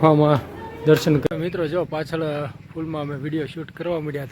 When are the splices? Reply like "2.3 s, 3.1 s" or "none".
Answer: 1.2 s

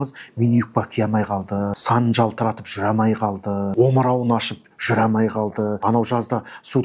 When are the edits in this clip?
1.8 s, 3.7 s, 5.8 s

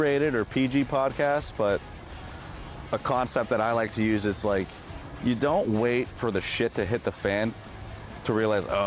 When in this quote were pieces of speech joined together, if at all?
none

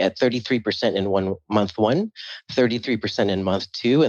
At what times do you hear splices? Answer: none

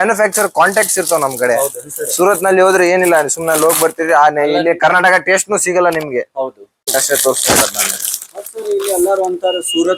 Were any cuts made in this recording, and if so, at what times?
6.8 s

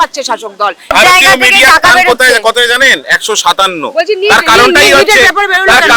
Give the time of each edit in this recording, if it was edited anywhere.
0.9 s

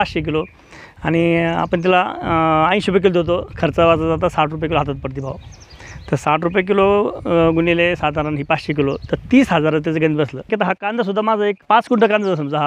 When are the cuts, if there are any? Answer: 10.5 s, 11.6 s

